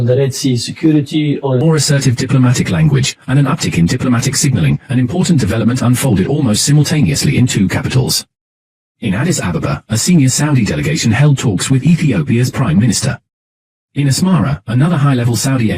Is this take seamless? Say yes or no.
no